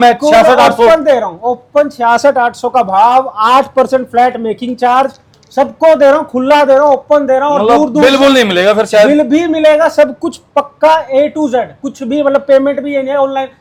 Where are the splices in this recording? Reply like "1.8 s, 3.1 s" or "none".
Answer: none

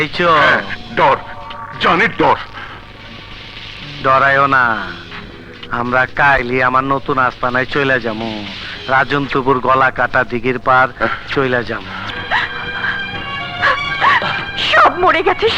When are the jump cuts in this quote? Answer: 12.1 s

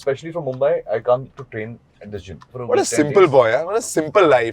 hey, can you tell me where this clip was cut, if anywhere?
2.5 s

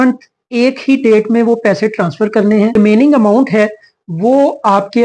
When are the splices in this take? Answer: 2.8 s

